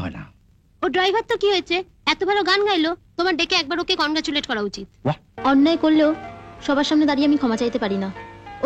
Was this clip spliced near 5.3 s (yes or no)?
yes